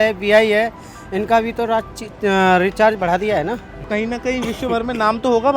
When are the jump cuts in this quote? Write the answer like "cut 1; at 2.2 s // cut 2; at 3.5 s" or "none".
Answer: cut 1; at 3.9 s